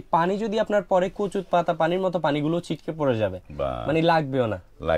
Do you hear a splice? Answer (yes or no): no